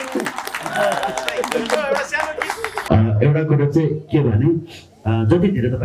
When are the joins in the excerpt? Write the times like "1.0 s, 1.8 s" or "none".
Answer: 2.7 s